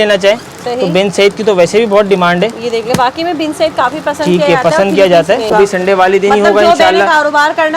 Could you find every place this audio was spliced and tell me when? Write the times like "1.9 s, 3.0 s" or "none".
5.5 s